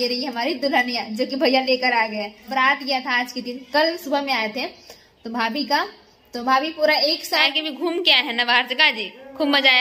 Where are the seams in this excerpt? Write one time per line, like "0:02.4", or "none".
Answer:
0:02.5
0:07.5